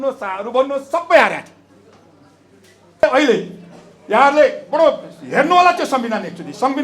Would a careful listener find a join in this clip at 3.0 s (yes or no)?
yes